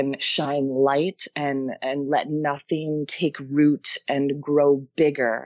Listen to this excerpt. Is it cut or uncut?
uncut